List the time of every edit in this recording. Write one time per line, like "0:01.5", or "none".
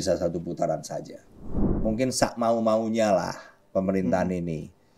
0:01.7